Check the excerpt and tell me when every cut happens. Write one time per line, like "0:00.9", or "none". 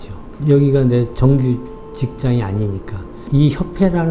none

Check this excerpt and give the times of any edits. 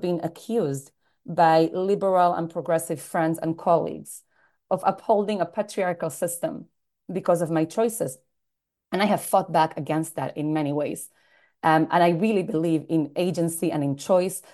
0:04.6

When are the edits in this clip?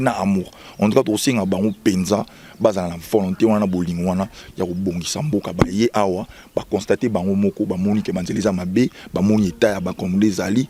none

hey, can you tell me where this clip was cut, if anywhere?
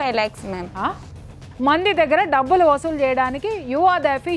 0:01.1

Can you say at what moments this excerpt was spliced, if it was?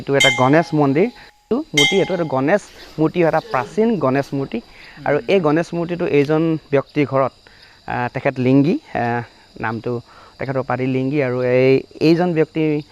0:01.5

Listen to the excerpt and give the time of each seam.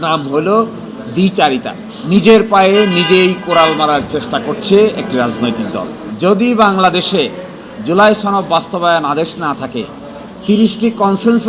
0:01.9
0:06.0

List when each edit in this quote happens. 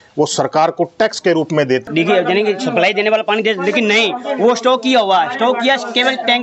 0:01.9

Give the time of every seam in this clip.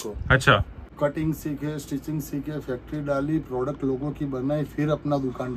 0:01.0

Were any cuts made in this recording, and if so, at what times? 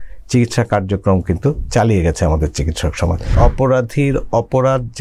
0:03.3

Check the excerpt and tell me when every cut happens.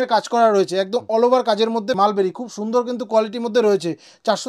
0:02.0

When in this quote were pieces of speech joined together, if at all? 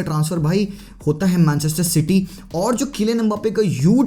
none

